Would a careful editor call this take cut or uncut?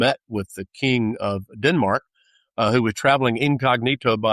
uncut